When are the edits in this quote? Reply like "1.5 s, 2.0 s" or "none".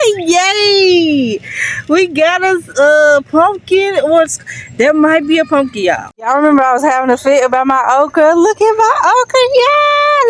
6.1 s